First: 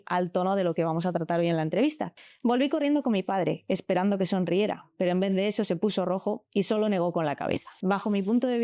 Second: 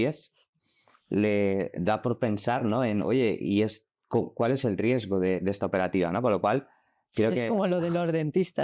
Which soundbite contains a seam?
first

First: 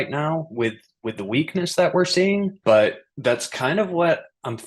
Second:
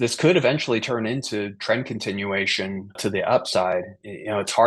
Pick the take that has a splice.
second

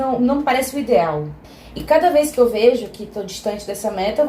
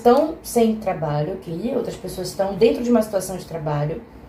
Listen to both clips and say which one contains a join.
first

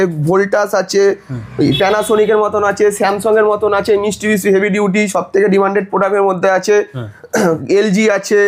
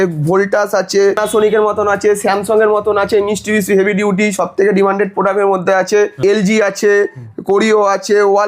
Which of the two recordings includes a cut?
second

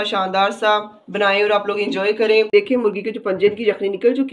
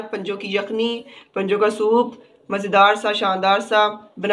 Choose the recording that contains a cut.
first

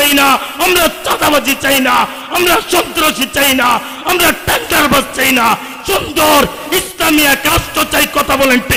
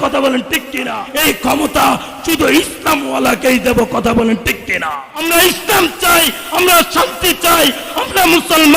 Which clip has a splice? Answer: second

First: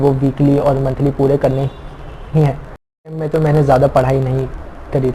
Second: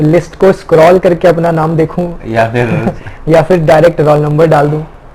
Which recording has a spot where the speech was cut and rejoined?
first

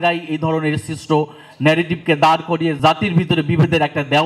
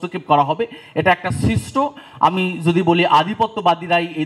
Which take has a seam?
first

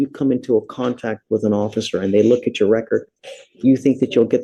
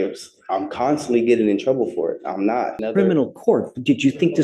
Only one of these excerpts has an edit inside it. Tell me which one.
second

